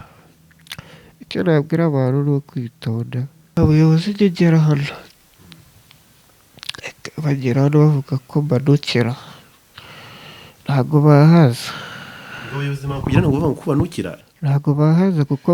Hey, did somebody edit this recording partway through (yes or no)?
yes